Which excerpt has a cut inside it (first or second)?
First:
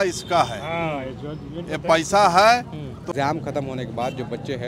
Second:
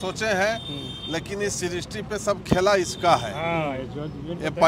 first